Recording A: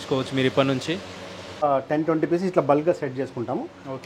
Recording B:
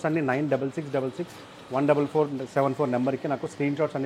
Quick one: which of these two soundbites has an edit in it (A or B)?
A